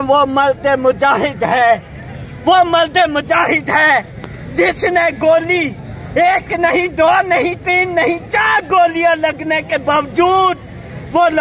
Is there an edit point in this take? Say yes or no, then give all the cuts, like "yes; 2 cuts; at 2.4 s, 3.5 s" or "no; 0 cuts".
no; 0 cuts